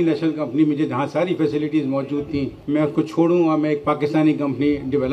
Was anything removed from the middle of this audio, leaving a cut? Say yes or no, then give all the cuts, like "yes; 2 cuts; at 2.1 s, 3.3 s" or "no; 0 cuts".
no; 0 cuts